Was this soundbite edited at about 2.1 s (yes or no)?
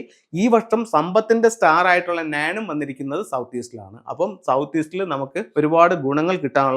no